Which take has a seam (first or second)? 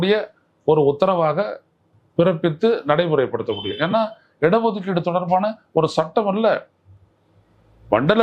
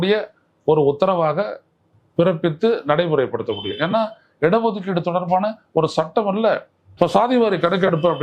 second